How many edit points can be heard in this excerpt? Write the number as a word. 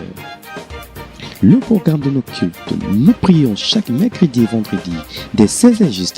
one